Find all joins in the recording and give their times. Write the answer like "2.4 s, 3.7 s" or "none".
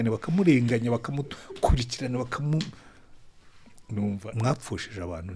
4.3 s